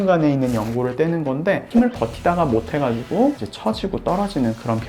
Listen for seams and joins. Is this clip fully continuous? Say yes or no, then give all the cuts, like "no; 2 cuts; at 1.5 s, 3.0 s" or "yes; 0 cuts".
no; 1 cut; at 1.7 s